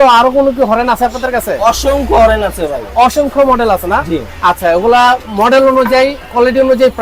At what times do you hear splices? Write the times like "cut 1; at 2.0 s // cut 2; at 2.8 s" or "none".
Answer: none